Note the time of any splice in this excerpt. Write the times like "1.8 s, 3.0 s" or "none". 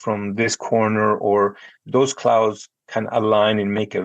none